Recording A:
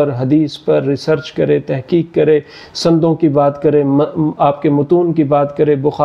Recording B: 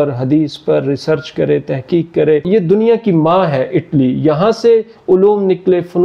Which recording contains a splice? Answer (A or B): B